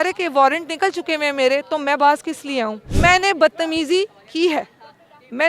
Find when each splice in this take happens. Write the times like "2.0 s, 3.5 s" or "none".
2.9 s